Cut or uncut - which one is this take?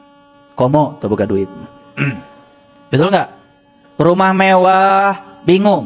uncut